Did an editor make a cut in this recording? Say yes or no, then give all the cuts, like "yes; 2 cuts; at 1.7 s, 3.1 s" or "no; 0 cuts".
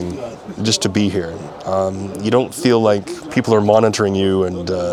no; 0 cuts